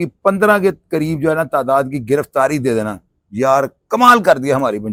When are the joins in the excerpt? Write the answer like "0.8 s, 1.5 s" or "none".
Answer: none